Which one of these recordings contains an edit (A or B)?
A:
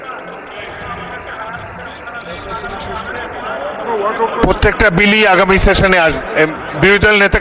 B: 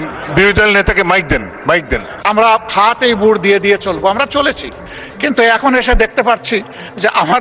B